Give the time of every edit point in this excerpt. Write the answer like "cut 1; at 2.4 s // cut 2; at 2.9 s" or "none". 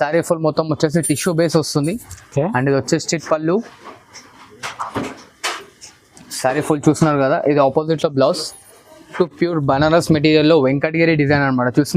cut 1; at 9.1 s